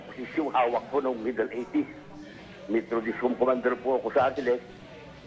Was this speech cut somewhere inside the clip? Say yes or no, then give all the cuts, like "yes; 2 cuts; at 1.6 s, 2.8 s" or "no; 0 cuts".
yes; 1 cut; at 1.2 s